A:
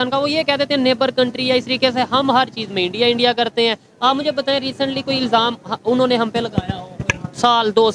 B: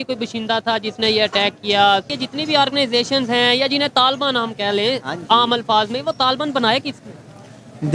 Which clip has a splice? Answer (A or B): B